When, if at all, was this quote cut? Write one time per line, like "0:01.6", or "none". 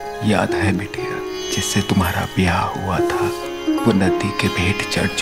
none

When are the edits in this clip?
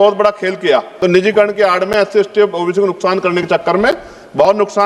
0:00.9

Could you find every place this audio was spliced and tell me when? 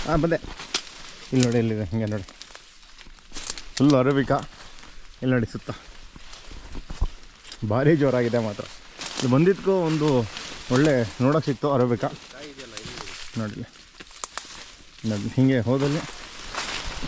none

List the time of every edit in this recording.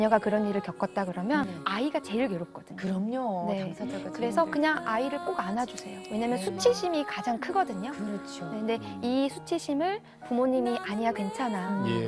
0:01.5

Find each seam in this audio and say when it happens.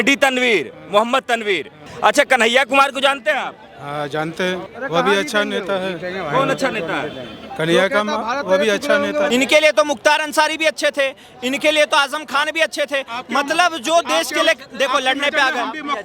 0:01.8
0:04.7
0:09.3

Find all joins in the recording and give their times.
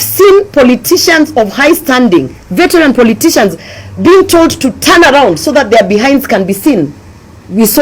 none

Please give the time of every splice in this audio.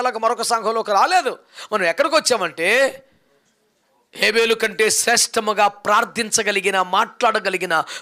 none

